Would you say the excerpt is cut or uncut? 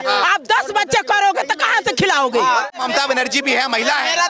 cut